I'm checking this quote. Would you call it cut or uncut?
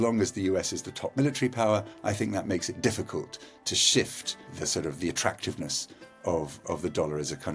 cut